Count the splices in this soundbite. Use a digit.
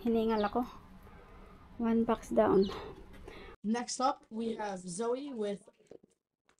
1